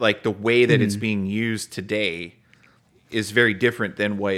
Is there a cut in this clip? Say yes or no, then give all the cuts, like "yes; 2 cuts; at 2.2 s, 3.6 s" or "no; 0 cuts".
no; 0 cuts